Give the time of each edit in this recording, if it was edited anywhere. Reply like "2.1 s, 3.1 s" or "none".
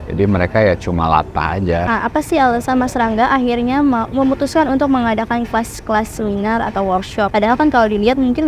1.9 s, 7.3 s